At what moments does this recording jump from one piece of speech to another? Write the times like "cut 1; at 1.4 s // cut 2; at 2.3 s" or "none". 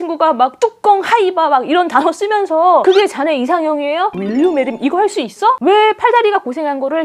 cut 1; at 2.8 s // cut 2; at 4.2 s // cut 3; at 5.6 s